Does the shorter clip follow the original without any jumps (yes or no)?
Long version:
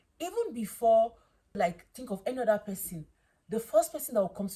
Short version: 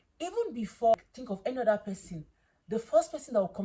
no